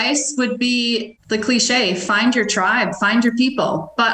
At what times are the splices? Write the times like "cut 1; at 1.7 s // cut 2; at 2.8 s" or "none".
cut 1; at 1.1 s